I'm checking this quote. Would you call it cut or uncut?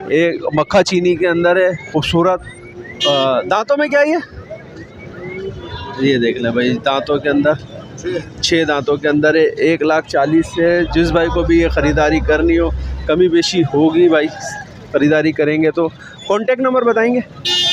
uncut